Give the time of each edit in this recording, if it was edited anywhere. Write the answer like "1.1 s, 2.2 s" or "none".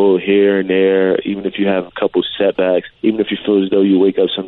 2.9 s